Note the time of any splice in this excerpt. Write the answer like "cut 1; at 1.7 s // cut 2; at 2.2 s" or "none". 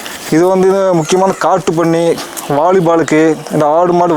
none